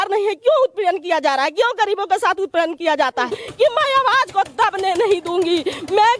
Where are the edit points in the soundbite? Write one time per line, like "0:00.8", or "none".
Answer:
0:03.3